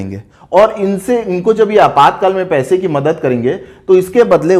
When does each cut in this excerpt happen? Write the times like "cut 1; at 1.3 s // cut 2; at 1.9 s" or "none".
none